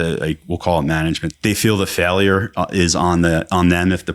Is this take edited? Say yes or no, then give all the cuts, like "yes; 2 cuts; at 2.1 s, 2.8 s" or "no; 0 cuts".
yes; 1 cut; at 1.3 s